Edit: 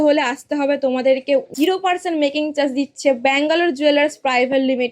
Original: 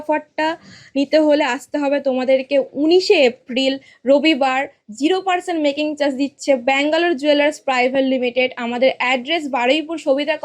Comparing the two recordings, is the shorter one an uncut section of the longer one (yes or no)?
no